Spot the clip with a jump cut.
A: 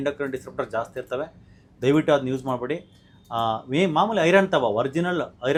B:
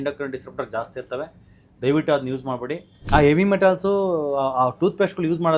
B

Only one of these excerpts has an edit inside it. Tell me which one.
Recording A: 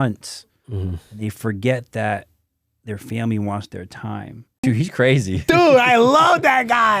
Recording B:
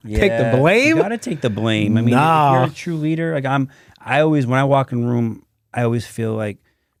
A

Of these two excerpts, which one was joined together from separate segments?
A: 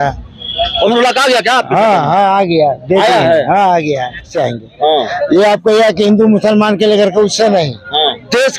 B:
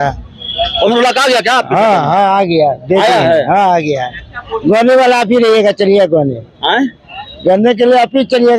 A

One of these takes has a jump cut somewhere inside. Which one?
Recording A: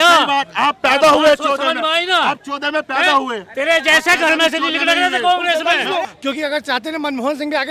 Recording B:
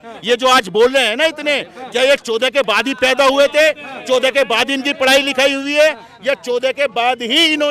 A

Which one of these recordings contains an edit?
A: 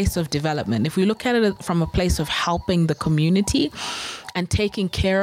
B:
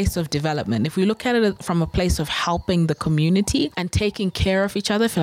B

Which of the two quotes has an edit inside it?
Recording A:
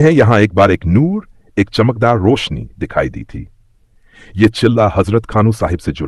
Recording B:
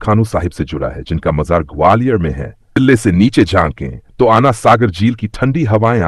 B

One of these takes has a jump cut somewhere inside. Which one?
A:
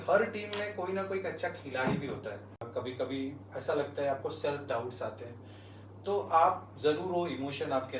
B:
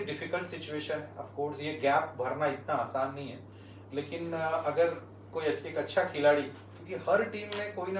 A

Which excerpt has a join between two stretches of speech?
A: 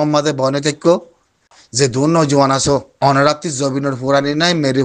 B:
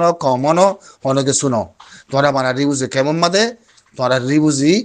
A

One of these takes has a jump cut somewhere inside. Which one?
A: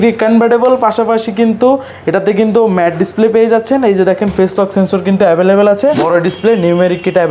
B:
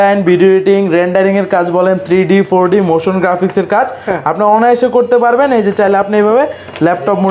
A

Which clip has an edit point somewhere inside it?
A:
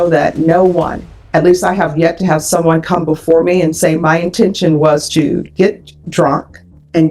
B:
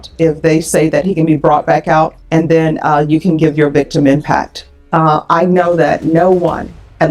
B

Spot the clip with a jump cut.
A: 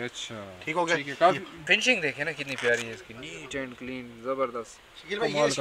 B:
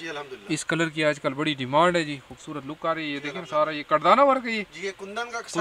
A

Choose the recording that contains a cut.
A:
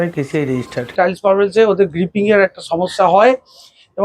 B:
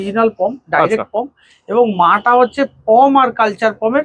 A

